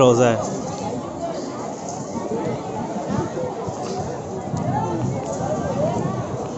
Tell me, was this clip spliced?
no; 0 cuts

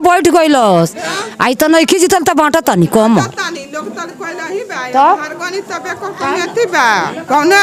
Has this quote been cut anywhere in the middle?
no; 0 cuts

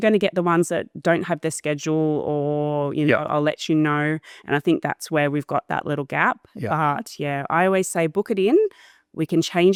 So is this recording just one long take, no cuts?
yes; 0 cuts

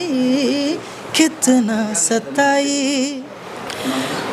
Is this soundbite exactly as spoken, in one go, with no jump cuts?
no; 1 cut; at 3.2 s

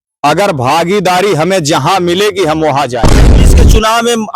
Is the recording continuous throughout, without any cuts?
no; 1 cut; at 3.4 s

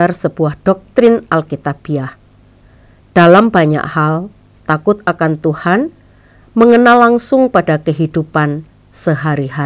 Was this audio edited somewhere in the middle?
no; 0 cuts

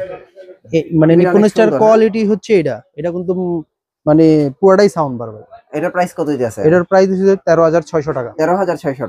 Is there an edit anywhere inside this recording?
no; 0 cuts

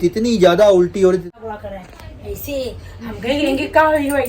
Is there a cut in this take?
yes; 1 cut; at 1.3 s

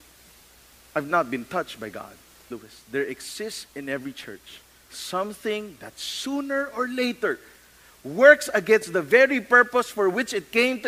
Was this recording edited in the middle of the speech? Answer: yes; 1 cut; at 2.4 s

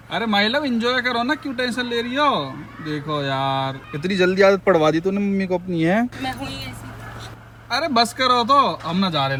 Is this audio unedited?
yes; 0 cuts

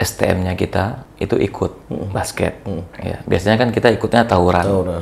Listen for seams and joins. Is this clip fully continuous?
no; 2 cuts; at 1.0 s, 1.8 s

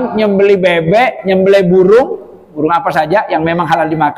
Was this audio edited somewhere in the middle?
no; 0 cuts

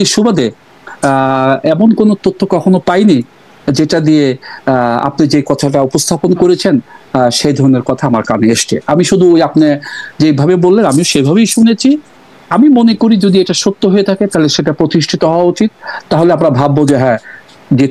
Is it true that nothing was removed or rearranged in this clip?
yes; 0 cuts

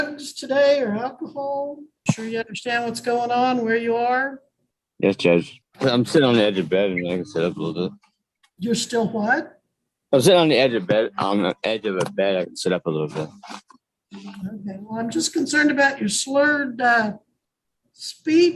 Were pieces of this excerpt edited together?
yes; 2 cuts; at 1.8 s, 5.6 s

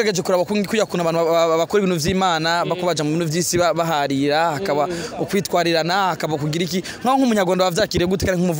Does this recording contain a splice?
no; 0 cuts

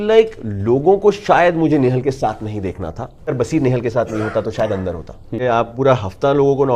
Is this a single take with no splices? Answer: no; 2 cuts; at 3.2 s, 5.4 s

